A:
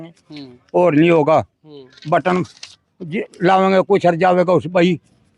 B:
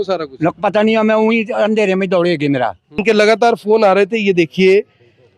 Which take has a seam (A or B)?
B